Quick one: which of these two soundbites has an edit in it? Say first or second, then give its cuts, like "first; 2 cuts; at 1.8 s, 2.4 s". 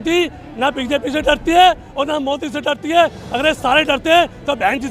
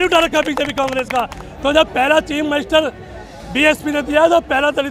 second; 1 cut; at 1.4 s